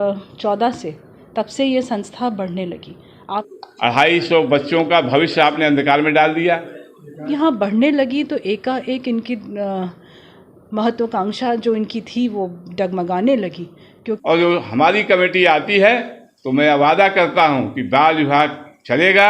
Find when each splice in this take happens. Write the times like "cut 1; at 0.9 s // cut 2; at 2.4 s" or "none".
cut 1; at 3.5 s // cut 2; at 7.3 s // cut 3; at 14.1 s